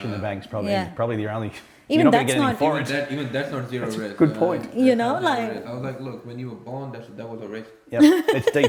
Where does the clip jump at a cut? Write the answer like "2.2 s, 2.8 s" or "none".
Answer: none